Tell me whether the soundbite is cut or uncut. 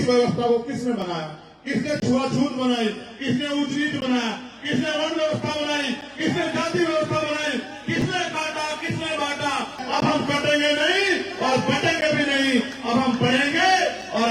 cut